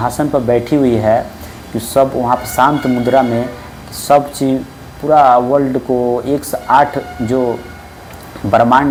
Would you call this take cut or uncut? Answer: uncut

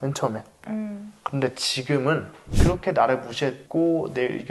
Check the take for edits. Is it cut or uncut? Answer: cut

